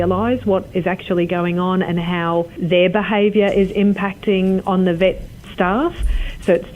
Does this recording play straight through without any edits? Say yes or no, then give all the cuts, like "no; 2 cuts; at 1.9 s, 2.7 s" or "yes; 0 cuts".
no; 1 cut; at 2.6 s